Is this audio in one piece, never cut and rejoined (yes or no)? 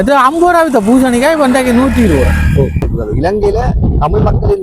no